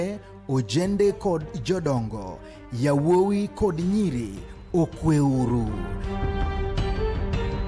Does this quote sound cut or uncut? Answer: cut